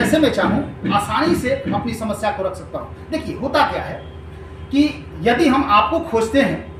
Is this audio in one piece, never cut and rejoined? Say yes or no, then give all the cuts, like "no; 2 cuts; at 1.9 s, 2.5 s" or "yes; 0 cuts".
yes; 0 cuts